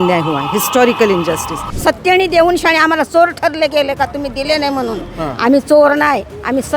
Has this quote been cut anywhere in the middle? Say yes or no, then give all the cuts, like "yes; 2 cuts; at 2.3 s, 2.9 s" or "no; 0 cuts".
yes; 1 cut; at 1.7 s